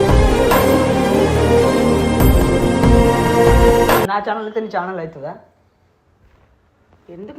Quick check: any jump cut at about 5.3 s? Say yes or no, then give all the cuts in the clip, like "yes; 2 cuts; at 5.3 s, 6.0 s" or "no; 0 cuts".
no; 1 cut; at 4.1 s